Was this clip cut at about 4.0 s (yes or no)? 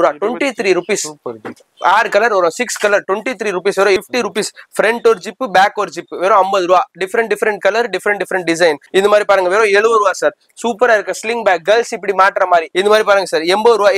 yes